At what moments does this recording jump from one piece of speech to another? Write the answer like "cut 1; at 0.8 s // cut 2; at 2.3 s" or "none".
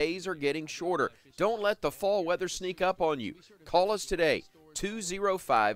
none